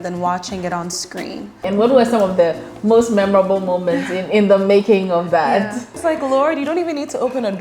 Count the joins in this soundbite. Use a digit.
2